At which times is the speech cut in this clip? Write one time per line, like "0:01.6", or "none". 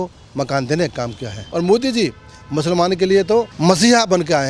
0:01.4
0:03.5